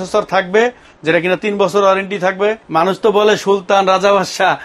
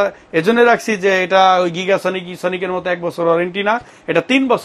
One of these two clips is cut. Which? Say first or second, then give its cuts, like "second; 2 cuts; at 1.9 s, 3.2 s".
first; 1 cut; at 2.6 s